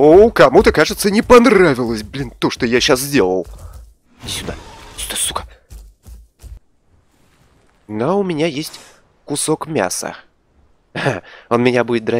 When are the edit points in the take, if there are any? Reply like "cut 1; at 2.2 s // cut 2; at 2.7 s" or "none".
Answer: cut 1; at 6.6 s